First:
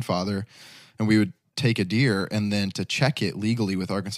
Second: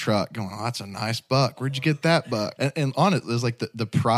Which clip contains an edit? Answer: second; 1 cut; at 2.5 s

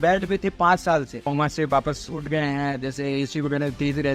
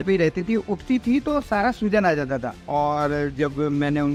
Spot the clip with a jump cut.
first; 1 cut; at 1.2 s

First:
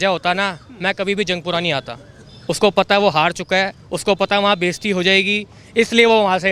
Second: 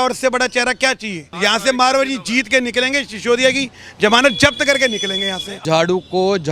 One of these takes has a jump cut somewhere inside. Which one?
second; 2 cuts; at 1.3 s, 5.6 s

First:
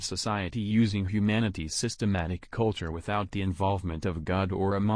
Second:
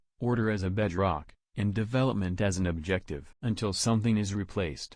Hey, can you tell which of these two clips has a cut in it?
second; 1 cut; at 3.1 s

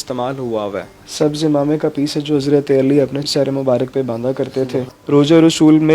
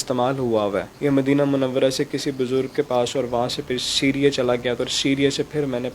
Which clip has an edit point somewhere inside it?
first; 3 cuts; at 0.9 s, 3.2 s, 5.0 s

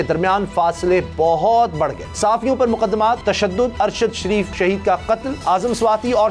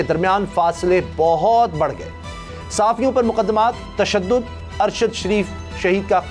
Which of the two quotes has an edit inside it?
first; 4 cuts; at 2.0 s, 3.5 s, 4.5 s, 5.3 s

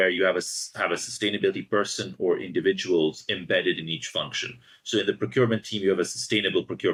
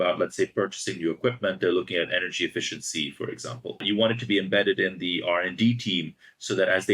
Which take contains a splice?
second; 1 cut; at 3.8 s

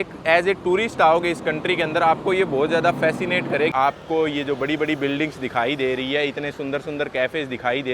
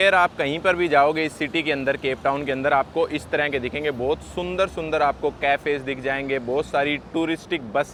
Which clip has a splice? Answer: first; 1 cut; at 3.7 s

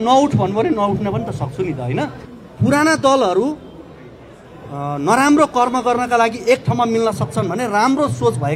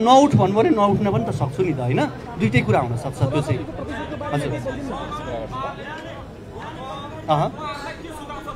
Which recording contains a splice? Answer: first; 1 cut; at 2.2 s

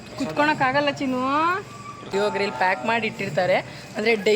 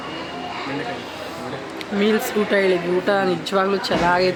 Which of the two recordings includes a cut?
first; 1 cut; at 2.1 s

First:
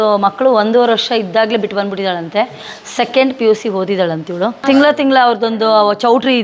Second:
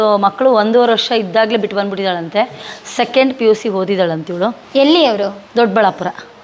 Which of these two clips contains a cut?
first; 1 cut; at 4.6 s

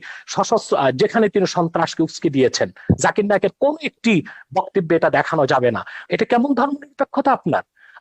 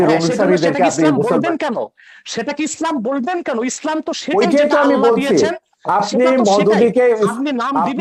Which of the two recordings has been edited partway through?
first; 1 cut; at 6.0 s

